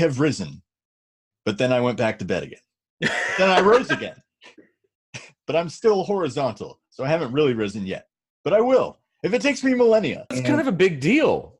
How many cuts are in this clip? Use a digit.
1